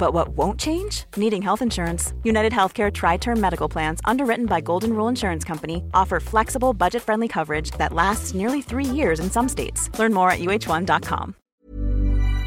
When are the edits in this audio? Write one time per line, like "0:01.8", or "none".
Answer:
0:11.4